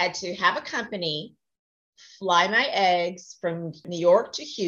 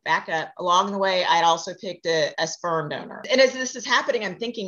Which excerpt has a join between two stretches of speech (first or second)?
second